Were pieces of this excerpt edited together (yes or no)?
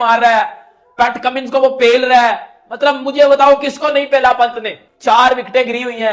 no